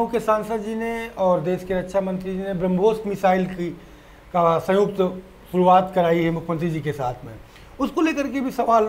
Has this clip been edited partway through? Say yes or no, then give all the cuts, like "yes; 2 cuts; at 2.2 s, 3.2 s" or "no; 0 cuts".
no; 0 cuts